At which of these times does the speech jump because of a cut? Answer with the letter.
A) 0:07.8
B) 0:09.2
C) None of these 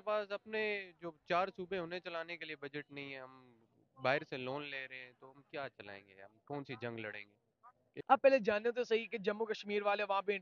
A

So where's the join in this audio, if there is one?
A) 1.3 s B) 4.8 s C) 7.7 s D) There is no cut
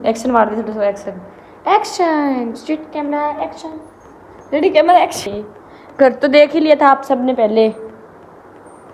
D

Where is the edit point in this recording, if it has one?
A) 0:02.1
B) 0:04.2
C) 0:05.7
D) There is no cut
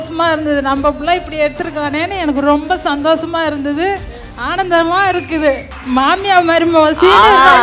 C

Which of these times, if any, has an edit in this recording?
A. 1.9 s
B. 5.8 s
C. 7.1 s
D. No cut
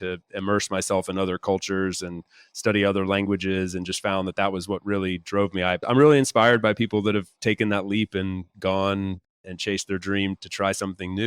B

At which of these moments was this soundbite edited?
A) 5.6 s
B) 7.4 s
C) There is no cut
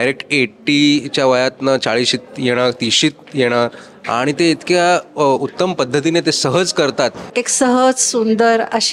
B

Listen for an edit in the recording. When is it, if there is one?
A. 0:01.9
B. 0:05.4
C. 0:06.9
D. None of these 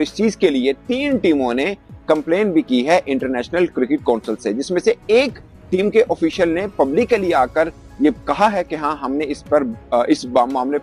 D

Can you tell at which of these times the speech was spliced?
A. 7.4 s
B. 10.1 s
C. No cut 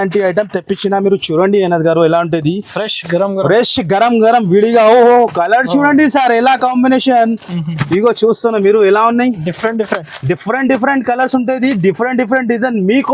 C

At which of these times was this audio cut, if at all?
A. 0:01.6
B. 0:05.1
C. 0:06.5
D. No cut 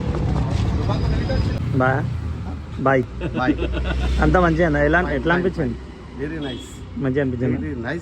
A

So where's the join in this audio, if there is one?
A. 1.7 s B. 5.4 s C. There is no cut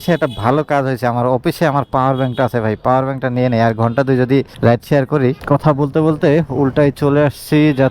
B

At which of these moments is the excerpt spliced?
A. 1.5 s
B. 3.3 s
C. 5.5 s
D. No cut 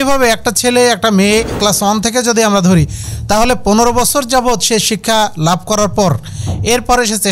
A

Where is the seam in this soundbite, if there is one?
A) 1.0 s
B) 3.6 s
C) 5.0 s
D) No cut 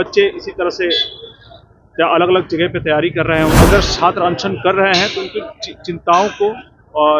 B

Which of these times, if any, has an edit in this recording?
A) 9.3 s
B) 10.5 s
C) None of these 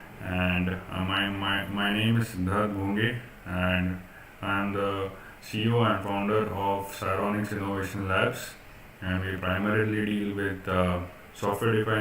A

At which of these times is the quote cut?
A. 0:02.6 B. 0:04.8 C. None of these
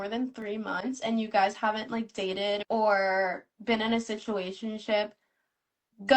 A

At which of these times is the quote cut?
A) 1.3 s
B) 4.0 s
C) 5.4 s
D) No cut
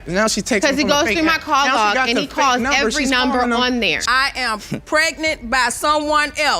B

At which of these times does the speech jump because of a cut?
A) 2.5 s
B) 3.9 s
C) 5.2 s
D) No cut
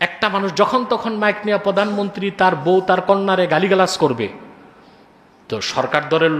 D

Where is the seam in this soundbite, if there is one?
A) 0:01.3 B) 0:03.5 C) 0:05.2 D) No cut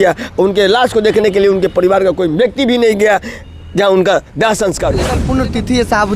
C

